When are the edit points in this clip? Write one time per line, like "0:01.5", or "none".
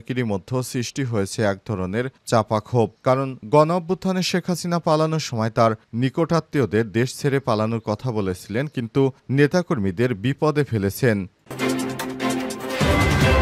0:11.4